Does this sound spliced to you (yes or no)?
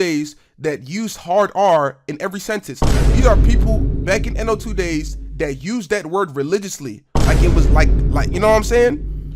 no